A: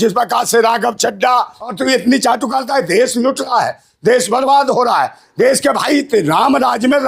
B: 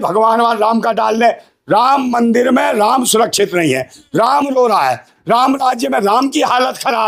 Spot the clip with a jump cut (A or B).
A